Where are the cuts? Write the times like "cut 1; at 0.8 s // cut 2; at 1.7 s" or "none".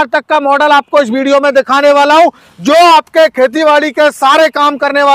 none